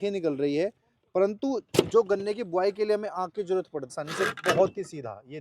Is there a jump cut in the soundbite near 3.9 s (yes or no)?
yes